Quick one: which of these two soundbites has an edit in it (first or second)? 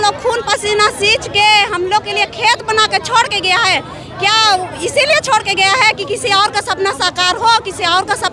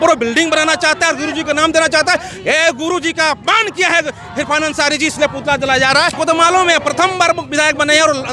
second